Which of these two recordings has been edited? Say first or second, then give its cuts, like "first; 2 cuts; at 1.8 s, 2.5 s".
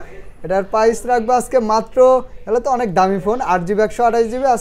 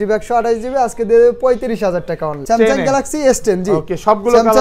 second; 1 cut; at 2.4 s